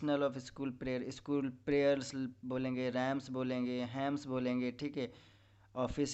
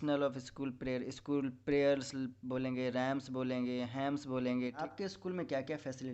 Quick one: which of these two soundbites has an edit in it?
second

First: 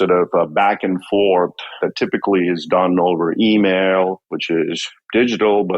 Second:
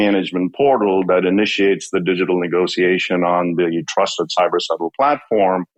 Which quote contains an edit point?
first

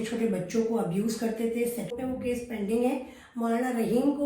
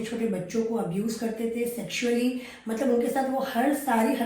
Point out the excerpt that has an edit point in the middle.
first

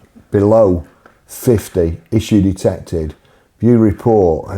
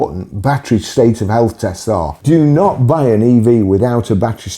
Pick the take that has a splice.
second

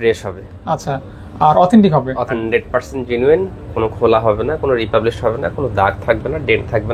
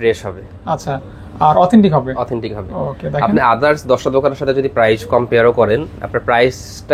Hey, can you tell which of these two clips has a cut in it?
first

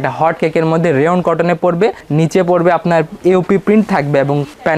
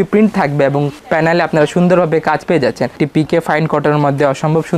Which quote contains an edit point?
second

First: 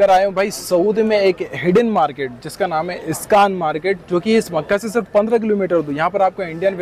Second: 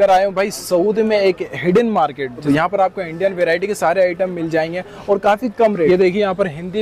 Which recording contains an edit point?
second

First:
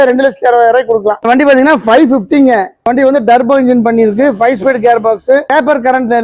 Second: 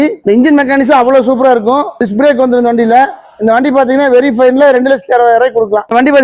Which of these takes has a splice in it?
first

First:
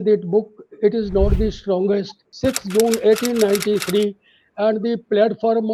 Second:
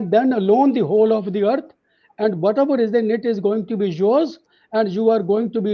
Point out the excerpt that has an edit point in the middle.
first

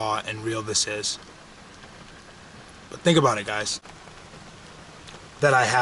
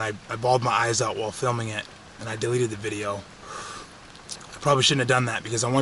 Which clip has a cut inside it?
first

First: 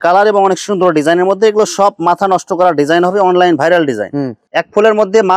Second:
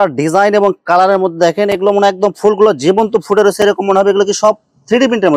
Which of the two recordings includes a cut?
first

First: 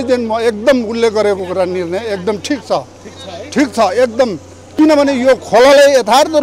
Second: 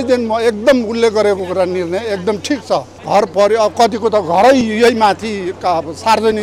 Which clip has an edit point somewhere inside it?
second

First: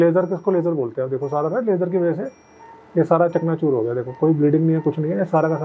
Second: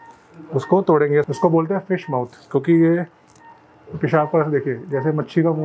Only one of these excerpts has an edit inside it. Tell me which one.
second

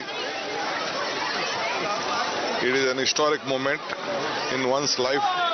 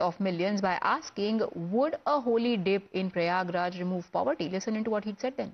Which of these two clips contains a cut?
second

